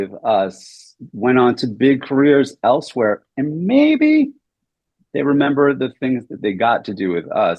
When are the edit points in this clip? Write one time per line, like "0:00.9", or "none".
none

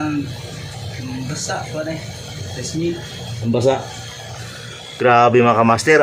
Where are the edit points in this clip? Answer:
none

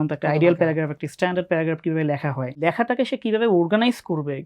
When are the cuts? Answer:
0:02.6

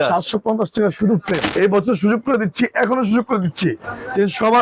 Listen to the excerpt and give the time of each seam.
0:01.5

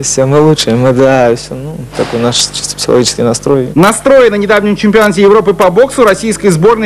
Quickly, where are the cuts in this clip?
0:03.8

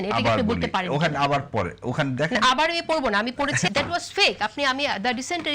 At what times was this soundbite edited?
0:03.7

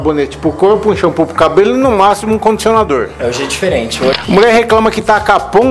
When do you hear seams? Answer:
0:04.2

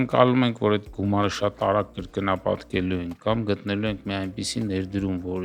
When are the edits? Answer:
none

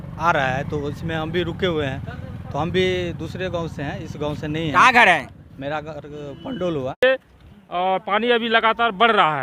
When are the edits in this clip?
0:07.0

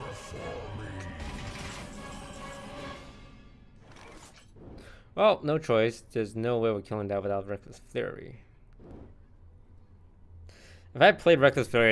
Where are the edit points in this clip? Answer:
0:04.7
0:08.9

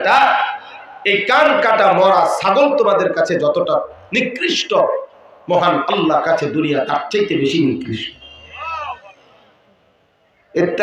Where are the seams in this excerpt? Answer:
none

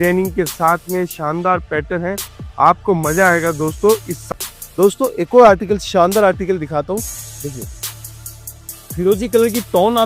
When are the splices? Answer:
0:04.2

